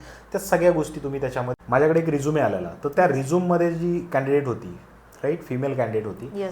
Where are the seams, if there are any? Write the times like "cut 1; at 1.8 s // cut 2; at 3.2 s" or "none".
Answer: cut 1; at 1.5 s